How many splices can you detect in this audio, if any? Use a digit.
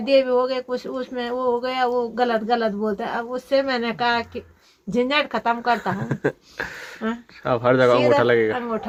0